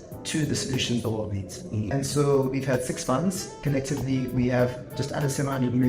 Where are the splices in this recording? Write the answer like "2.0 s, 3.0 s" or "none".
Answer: 1.9 s